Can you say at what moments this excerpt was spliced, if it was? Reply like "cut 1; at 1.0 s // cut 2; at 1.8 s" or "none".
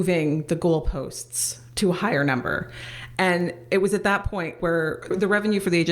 cut 1; at 4.5 s